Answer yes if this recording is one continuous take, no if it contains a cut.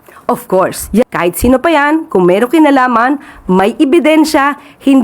no